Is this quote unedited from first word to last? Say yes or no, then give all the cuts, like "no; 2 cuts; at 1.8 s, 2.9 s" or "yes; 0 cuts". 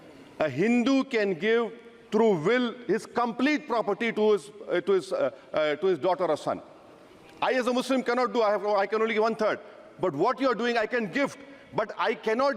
yes; 0 cuts